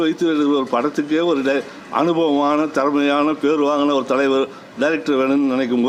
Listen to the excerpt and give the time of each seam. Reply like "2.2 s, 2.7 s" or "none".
none